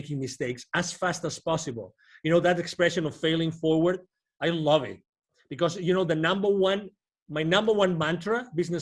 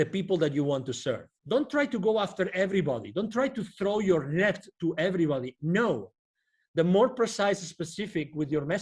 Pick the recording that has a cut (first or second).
second